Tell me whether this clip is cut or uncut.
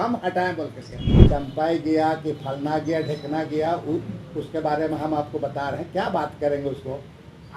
cut